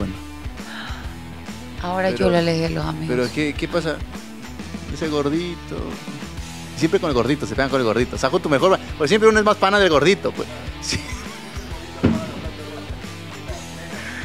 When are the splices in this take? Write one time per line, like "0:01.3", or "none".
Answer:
none